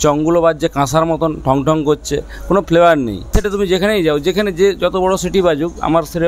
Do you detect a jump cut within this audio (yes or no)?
yes